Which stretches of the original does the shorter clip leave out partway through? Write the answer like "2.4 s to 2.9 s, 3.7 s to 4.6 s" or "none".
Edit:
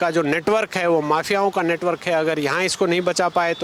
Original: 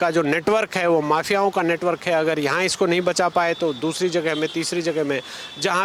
none